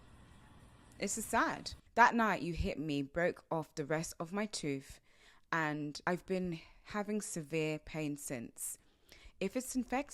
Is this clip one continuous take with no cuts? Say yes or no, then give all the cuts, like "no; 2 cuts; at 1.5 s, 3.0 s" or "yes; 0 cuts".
no; 2 cuts; at 1.7 s, 6.1 s